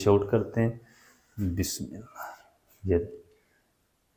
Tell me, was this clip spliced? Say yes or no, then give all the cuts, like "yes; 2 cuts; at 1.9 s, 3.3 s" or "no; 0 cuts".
no; 0 cuts